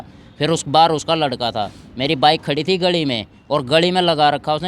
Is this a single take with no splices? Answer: yes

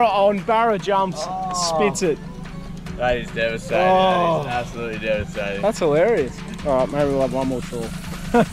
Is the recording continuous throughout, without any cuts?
no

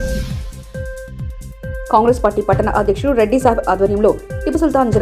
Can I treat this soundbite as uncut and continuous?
yes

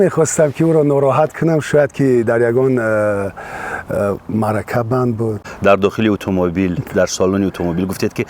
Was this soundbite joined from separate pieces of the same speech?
yes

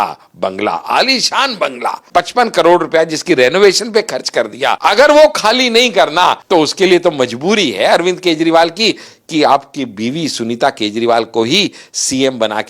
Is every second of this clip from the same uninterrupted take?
no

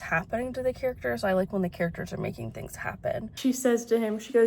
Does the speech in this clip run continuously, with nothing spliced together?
no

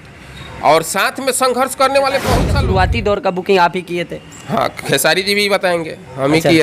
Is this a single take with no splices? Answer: no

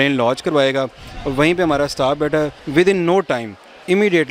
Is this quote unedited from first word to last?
no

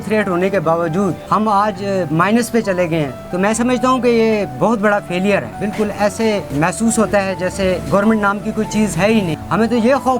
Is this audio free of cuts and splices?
no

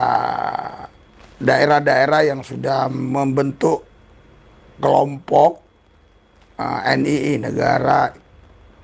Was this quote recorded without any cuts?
yes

